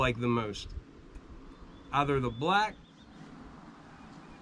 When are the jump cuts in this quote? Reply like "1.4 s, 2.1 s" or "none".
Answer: 3.0 s